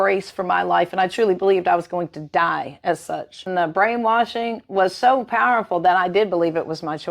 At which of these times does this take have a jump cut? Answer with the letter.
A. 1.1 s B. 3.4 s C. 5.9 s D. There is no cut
B